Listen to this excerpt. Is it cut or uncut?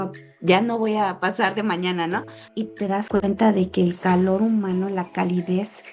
cut